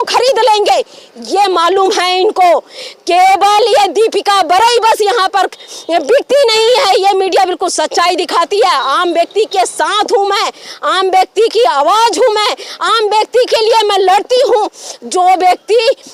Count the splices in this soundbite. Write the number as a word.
zero